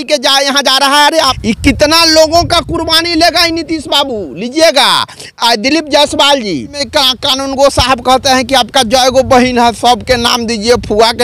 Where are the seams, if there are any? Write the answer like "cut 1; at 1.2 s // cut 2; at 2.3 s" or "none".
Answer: cut 1; at 1.4 s // cut 2; at 6.8 s